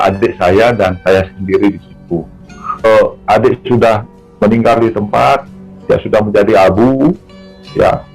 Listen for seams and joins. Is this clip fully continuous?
no; 1 cut; at 2.8 s

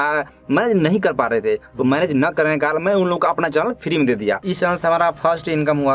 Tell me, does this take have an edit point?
yes; 1 cut; at 4.5 s

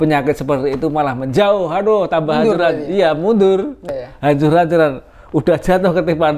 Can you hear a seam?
yes; 1 cut; at 3.9 s

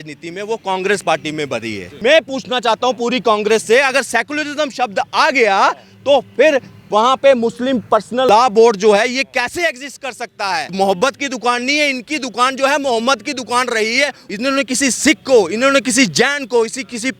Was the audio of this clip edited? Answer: yes; 4 cuts; at 1.9 s, 8.3 s, 10.7 s, 14.2 s

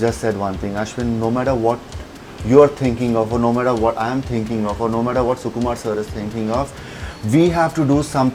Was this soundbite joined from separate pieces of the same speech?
no; 0 cuts

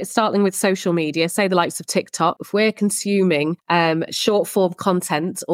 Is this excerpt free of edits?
no; 2 cuts; at 2.4 s, 3.6 s

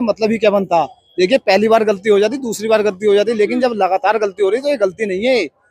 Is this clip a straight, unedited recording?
yes; 0 cuts

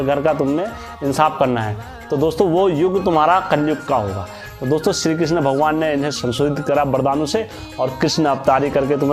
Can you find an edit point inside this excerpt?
no; 0 cuts

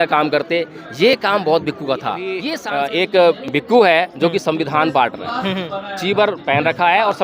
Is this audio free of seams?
no; 1 cut; at 2.5 s

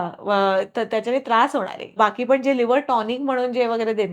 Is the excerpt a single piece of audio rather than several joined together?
no; 1 cut; at 1.8 s

